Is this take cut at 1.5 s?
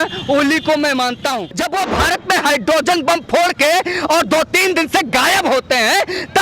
yes; 1 cut; at 1.5 s

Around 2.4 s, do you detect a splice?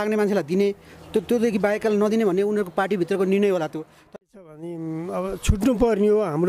no; 1 cut; at 4.0 s

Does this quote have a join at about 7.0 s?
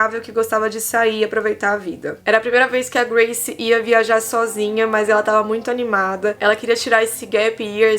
no; 1 cut; at 2.1 s

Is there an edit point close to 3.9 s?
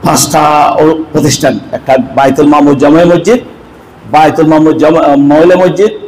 no; 0 cuts

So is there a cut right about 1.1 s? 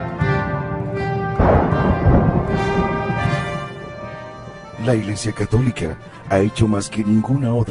yes; 1 cut; at 1.1 s

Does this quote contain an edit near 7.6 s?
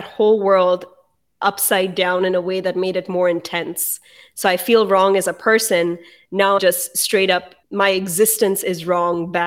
yes; 2 cuts; at 6.6 s, 7.6 s

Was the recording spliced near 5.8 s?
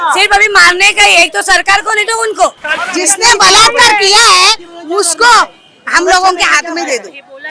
no; 1 cut; at 2.7 s

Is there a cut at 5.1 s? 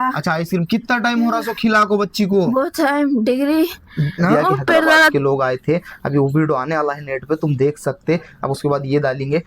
yes; 1 cut; at 5.1 s

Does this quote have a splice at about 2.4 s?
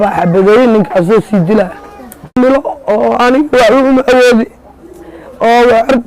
yes; 1 cut; at 2.4 s

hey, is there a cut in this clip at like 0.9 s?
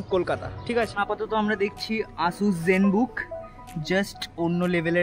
yes; 1 cut; at 0.9 s

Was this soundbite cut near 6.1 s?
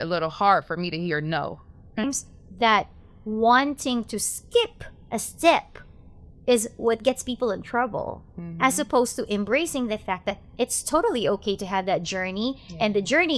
no; 1 cut; at 2.0 s

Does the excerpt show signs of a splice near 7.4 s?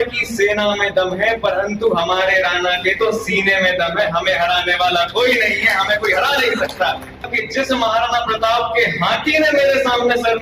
yes; 1 cut; at 7.4 s

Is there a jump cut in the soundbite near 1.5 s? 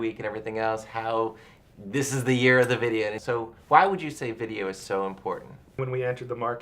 no; 2 cuts; at 3.2 s, 5.8 s

